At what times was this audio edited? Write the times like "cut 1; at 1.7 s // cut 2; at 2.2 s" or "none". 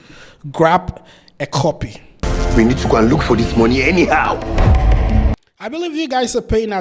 cut 1; at 2.2 s